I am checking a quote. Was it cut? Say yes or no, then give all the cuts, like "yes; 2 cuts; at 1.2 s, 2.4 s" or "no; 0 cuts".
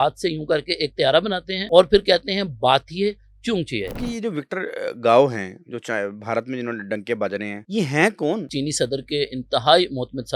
yes; 4 cuts; at 1.5 s, 4.0 s, 7.6 s, 8.5 s